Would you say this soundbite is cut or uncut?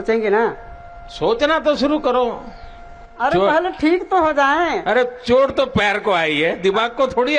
uncut